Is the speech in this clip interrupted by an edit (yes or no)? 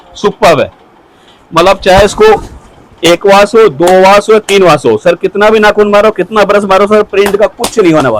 no